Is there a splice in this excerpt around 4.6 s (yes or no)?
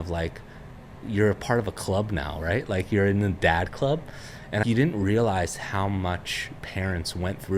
yes